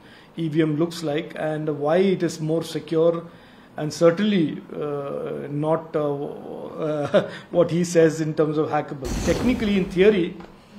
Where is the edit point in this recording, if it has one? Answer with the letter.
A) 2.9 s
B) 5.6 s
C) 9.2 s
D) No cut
C